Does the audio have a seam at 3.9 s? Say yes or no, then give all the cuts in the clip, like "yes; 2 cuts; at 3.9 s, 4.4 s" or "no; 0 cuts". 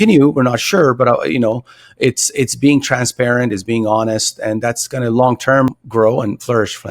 no; 1 cut; at 5.8 s